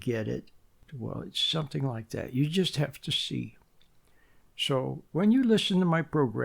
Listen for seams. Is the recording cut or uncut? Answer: cut